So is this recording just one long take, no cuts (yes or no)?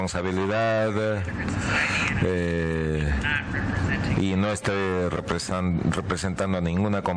no